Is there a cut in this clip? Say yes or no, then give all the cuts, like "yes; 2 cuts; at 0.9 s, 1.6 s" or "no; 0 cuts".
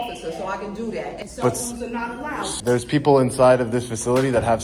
yes; 2 cuts; at 1.2 s, 2.5 s